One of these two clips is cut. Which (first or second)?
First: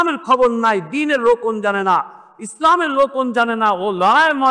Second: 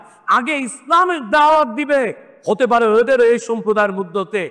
second